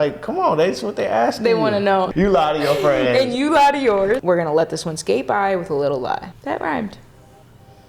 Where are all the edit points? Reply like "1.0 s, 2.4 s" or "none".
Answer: 2.1 s, 4.2 s, 6.3 s